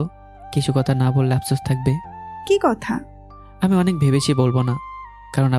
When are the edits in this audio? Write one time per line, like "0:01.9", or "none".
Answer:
0:02.3